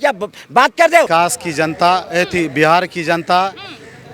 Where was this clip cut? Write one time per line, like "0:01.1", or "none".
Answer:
0:01.1